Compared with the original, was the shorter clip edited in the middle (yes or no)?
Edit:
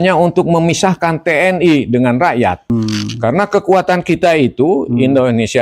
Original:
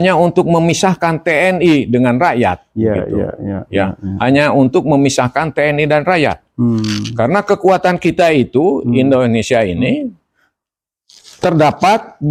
yes